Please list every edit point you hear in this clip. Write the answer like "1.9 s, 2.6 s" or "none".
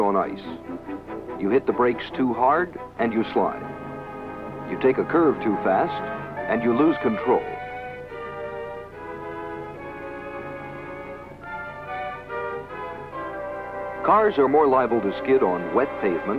1.6 s

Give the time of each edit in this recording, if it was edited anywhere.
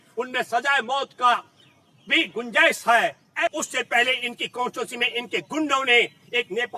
3.5 s

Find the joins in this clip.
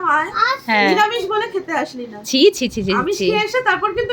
none

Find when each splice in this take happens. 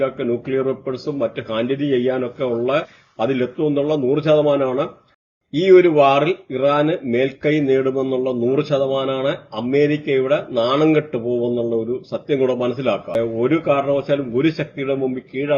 5.4 s, 13.1 s

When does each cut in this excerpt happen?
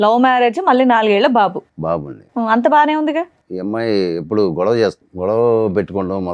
3.4 s, 5.1 s

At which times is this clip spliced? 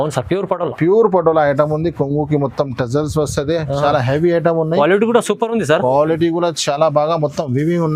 none

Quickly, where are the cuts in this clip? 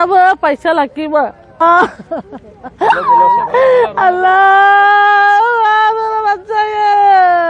1.6 s

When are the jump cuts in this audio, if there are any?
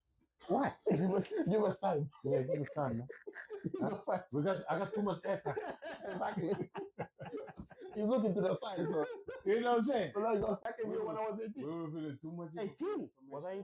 10.7 s

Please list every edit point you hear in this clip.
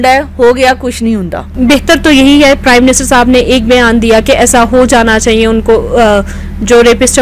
1.5 s

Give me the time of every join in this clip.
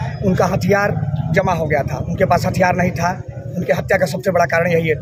none

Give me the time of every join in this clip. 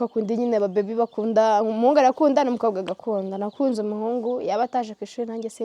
4.7 s

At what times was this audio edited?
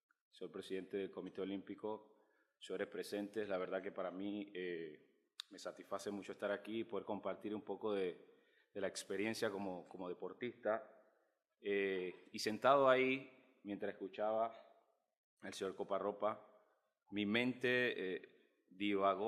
none

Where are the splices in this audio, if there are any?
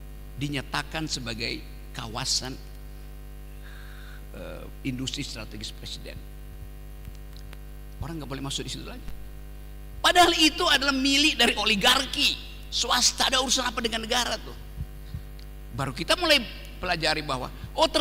none

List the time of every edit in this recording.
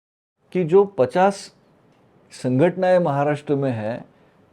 none

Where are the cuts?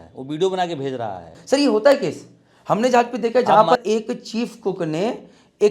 1.4 s, 3.8 s

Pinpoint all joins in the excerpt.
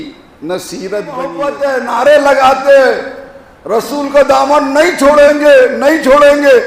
1.5 s

